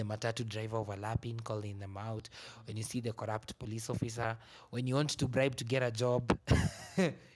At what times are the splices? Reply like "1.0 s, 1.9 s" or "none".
none